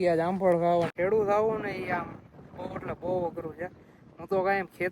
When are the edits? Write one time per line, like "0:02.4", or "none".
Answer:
0:00.9